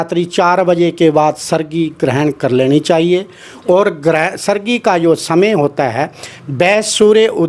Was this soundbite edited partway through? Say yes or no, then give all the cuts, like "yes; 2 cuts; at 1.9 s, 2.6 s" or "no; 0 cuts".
no; 0 cuts